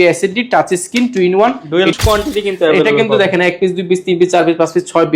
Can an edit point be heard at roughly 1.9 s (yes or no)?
yes